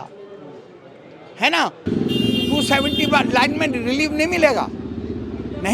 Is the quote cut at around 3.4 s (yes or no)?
no